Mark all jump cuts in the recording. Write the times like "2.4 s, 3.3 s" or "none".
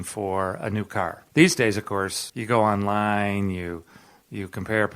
1.2 s, 2.2 s